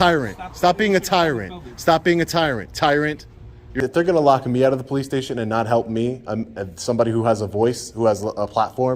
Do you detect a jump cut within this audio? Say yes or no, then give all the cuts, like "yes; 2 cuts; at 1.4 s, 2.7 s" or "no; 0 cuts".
yes; 1 cut; at 3.8 s